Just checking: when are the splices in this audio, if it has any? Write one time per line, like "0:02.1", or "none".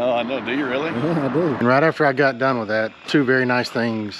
0:01.6